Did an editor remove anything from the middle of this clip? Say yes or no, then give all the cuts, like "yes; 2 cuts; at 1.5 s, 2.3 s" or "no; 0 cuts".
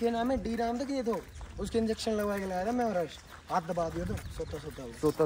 no; 0 cuts